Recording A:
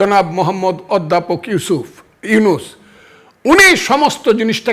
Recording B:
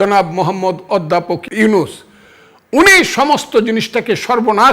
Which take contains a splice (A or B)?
B